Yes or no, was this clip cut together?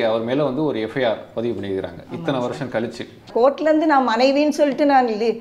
yes